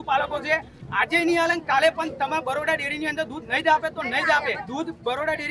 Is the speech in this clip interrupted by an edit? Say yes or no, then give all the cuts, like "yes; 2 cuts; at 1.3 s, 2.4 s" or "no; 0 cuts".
yes; 1 cut; at 4.6 s